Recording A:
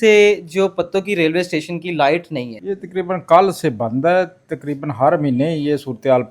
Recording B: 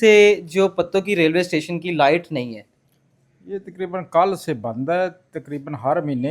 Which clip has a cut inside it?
A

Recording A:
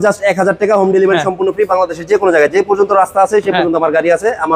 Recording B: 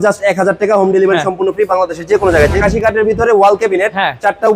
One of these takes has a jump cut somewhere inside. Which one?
B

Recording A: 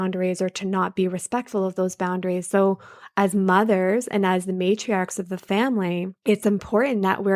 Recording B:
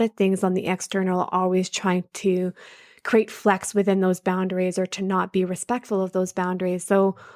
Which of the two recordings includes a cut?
A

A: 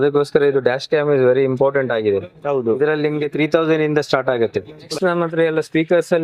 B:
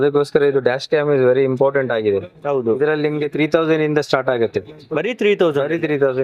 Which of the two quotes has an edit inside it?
A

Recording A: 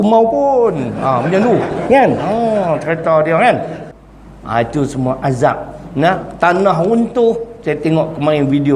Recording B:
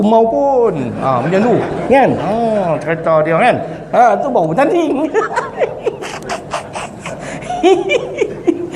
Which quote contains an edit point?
A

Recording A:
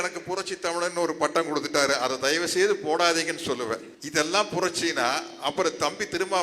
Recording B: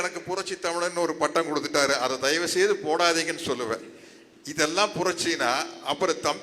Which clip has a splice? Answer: A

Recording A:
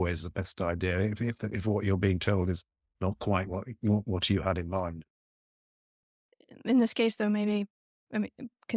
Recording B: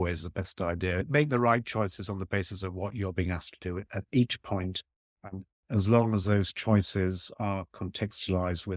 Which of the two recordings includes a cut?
B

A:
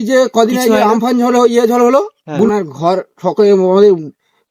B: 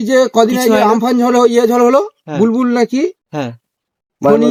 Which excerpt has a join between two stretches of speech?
A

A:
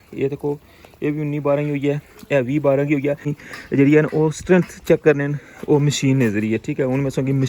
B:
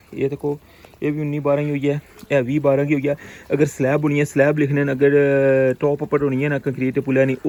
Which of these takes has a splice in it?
A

